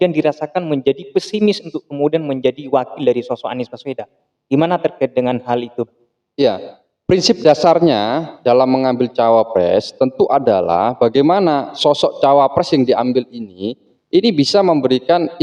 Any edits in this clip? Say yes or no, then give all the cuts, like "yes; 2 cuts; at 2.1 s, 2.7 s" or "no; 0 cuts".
no; 0 cuts